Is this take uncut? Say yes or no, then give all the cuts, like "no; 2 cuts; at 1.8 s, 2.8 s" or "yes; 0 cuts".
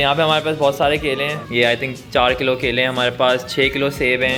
yes; 0 cuts